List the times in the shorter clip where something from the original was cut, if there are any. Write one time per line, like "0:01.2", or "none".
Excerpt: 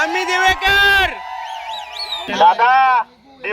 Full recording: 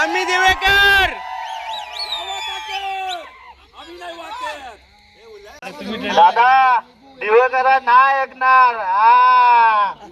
0:02.4